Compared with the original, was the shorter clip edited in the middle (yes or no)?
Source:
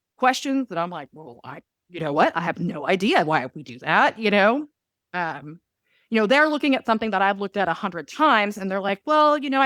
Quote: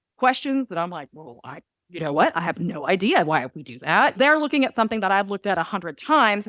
yes